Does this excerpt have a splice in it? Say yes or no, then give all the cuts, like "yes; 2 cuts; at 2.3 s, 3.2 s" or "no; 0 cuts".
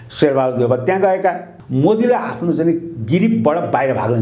yes; 1 cut; at 1.5 s